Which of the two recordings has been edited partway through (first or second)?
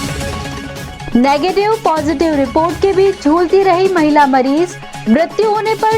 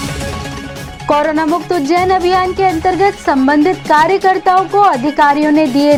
first